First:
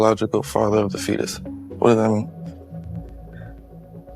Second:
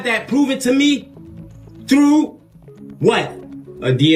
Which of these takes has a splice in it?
first; 1 cut; at 2.2 s

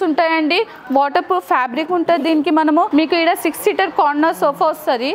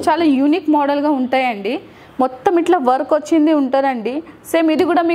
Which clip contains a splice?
first; 1 cut; at 2.9 s

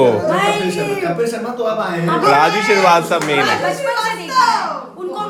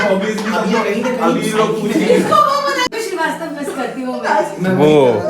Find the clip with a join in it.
second; 1 cut; at 2.9 s

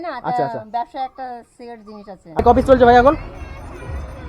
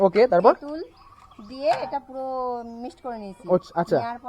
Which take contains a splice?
first; 1 cut; at 2.4 s

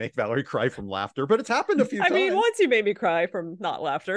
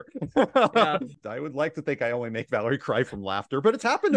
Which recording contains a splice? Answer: second; 1 cut; at 1.2 s

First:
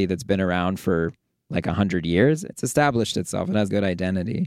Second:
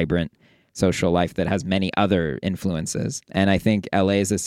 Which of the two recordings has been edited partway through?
first; 2 cuts; at 2.4 s, 3.7 s

